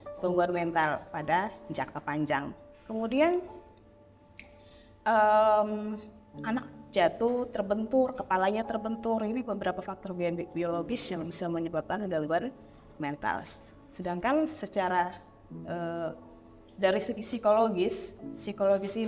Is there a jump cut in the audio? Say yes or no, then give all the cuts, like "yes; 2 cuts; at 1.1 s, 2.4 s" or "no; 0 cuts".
no; 0 cuts